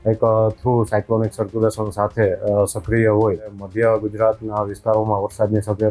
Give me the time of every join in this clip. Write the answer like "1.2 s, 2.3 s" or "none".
3.6 s